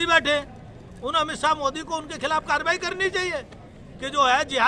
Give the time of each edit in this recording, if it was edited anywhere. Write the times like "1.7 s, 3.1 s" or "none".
none